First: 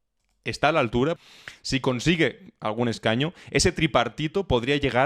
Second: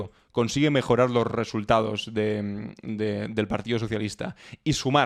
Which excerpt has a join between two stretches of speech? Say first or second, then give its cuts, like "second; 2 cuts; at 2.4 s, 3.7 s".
first; 1 cut; at 1.2 s